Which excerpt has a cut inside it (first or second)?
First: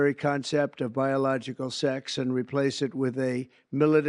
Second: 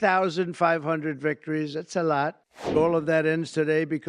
second